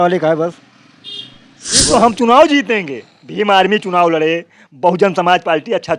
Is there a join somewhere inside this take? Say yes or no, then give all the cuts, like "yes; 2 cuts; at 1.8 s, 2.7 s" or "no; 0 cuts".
yes; 1 cut; at 1.9 s